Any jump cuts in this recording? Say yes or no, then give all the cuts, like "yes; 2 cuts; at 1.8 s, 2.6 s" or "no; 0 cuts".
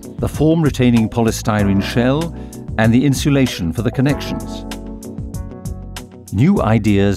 yes; 2 cuts; at 4.3 s, 6.1 s